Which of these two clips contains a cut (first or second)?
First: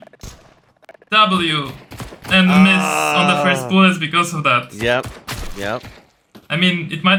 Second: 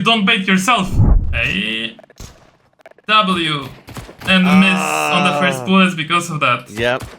second